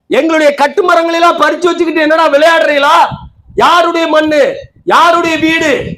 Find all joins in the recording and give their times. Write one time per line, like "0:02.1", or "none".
none